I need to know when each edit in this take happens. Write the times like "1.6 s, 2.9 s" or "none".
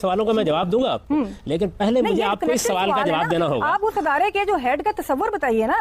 none